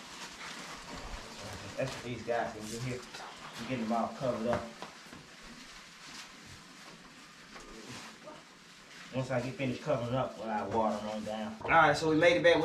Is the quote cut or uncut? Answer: cut